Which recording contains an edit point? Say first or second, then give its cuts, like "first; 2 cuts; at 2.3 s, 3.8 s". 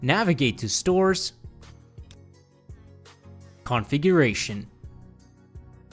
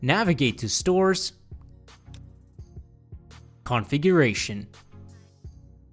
first; 3 cuts; at 1.3 s, 3.6 s, 4.7 s